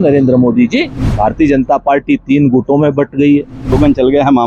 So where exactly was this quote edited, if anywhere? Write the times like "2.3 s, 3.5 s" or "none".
1.0 s, 3.7 s

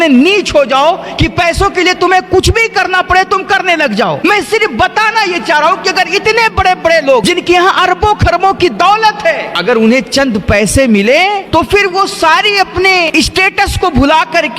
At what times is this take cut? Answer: 4.2 s, 7.2 s, 9.5 s, 11.4 s, 13.1 s

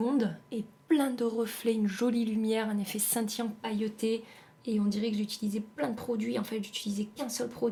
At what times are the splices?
none

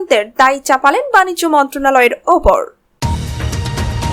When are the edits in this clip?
2.9 s

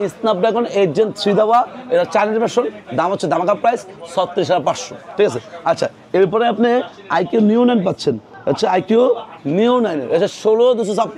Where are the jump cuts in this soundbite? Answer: none

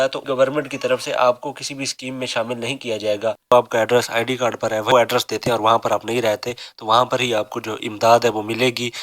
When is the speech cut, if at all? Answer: 3.5 s, 4.9 s

